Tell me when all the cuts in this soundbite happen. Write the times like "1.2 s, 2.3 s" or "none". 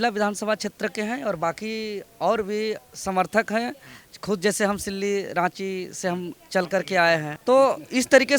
7.3 s